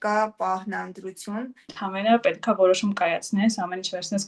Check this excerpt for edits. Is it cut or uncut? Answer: cut